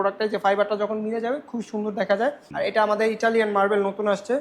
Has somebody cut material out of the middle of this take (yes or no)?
yes